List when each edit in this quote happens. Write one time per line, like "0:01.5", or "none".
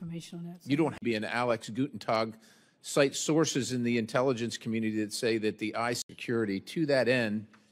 0:01.0
0:06.1